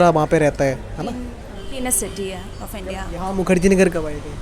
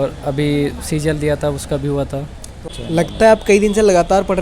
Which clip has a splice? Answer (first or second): second